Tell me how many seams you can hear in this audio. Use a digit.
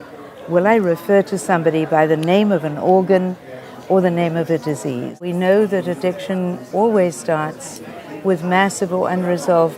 1